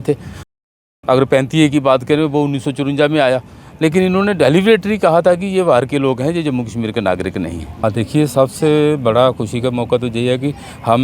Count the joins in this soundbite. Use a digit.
1